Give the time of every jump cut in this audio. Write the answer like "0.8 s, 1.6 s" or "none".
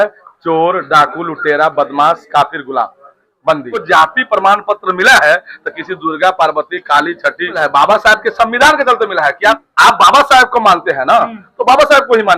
3.8 s, 7.6 s, 9.7 s

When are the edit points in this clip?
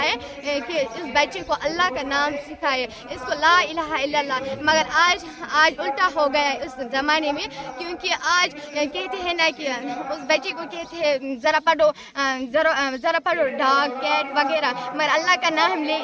none

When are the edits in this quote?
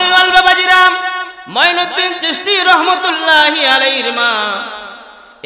1.4 s

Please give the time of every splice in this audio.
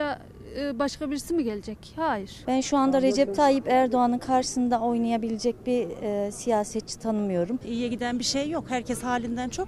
2.3 s, 7.6 s

